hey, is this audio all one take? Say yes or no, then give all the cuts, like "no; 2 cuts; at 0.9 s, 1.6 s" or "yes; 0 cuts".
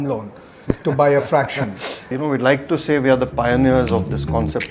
no; 1 cut; at 2.1 s